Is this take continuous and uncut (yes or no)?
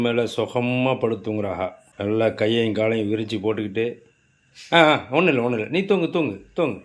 no